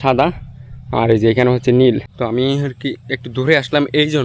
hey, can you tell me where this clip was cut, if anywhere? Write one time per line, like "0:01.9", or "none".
0:02.1